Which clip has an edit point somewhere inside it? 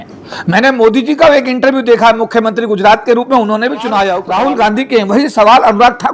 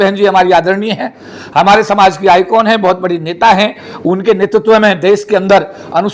first; 1 cut; at 4.3 s

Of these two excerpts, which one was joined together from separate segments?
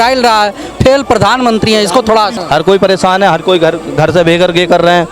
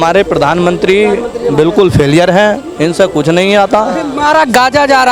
first; 1 cut; at 2.3 s

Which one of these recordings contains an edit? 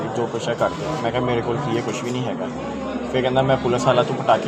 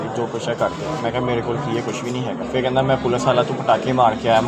second; 1 cut; at 2.4 s

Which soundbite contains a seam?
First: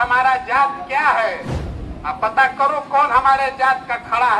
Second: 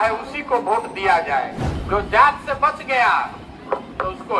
second; 1 cut; at 1.7 s

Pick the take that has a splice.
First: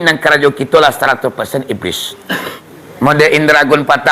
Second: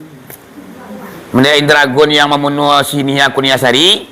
first; 1 cut; at 2.6 s

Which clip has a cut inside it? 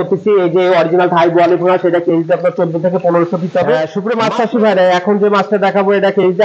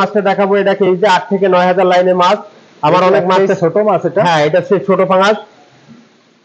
first; 1 cut; at 3.9 s

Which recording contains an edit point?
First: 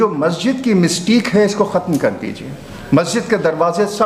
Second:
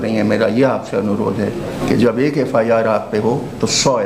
second; 1 cut; at 1.7 s

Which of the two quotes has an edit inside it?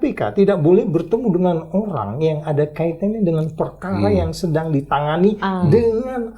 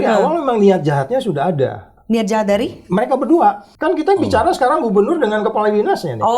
second; 1 cut; at 3.7 s

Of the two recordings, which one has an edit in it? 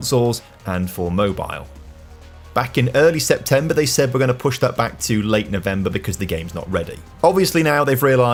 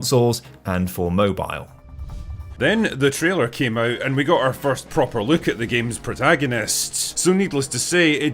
second; 2 cuts; at 2.3 s, 7.1 s

